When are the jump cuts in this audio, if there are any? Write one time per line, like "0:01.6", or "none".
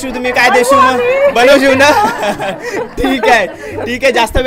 none